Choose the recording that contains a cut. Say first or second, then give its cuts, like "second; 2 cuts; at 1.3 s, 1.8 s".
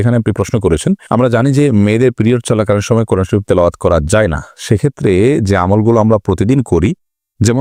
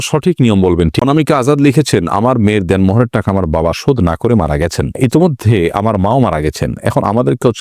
second; 1 cut; at 1.0 s